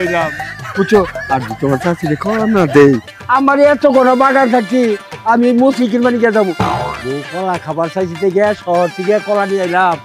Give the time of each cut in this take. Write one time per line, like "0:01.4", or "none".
0:03.1